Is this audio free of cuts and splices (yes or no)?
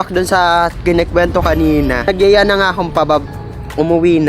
no